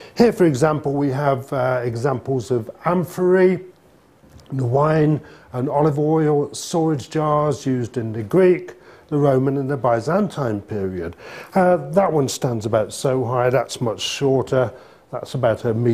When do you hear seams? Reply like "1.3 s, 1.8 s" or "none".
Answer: none